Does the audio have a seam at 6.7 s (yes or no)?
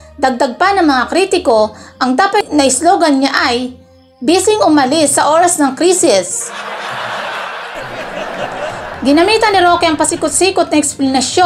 no